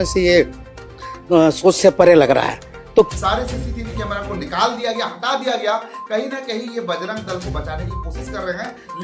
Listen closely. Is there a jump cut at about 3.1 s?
yes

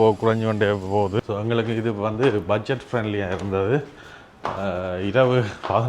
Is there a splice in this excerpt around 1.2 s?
yes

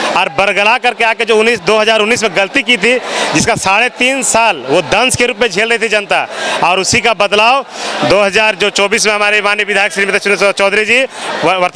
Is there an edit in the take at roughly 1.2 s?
no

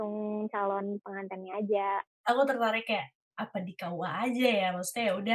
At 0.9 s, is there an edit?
no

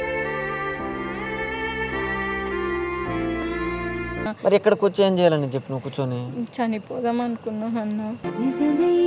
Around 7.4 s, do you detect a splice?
no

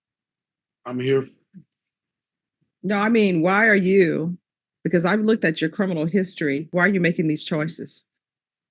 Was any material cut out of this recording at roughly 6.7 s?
yes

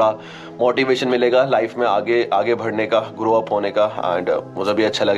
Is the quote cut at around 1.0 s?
no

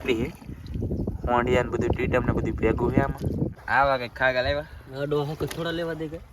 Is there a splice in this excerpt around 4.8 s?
no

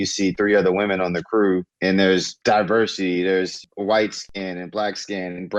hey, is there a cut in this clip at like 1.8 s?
no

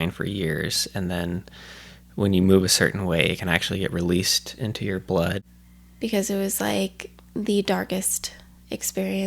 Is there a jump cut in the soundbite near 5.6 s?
yes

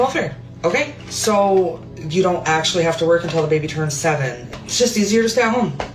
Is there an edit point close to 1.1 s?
no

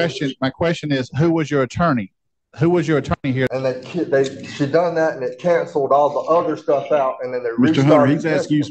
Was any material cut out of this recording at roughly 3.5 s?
yes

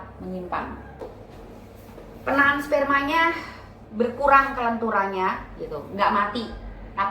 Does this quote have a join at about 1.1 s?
yes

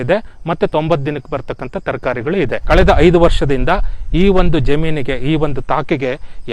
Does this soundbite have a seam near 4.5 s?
no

